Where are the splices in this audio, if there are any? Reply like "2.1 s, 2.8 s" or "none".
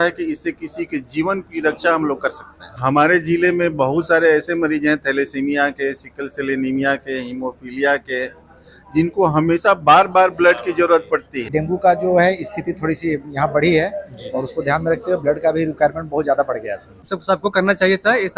2.8 s, 11.5 s, 17.1 s